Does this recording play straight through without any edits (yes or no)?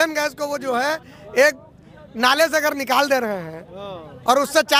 yes